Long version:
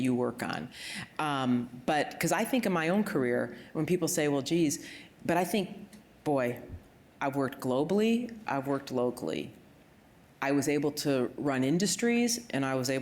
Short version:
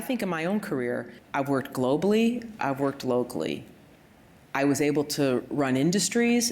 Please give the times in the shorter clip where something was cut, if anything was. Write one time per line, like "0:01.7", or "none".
0:01.2